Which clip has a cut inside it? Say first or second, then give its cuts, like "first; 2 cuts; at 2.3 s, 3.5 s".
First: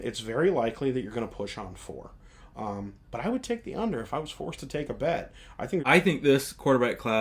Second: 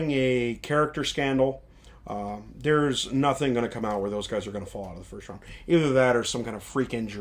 first; 1 cut; at 5.8 s